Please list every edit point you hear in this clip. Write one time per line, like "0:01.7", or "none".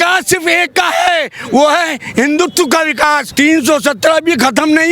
0:03.3